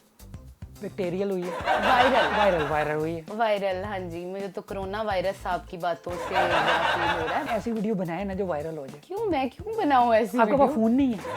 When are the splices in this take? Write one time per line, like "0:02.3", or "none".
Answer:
0:01.6
0:06.2
0:07.4